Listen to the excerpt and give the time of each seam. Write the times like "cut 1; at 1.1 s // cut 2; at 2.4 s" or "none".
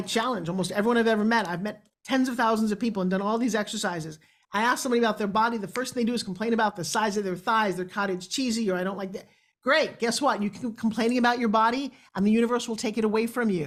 none